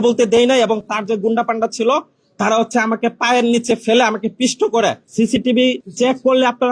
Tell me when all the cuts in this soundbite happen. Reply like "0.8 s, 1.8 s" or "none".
5.0 s, 5.9 s